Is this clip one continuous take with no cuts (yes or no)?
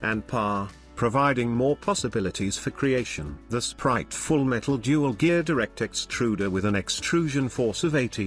no